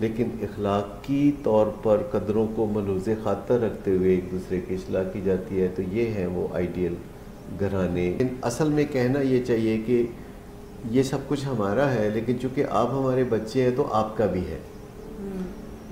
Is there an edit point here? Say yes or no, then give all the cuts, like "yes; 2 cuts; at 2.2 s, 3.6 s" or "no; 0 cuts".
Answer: yes; 1 cut; at 8.2 s